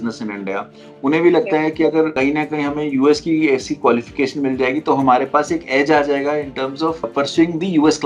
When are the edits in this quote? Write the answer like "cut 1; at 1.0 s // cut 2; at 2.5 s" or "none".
cut 1; at 2.1 s // cut 2; at 7.1 s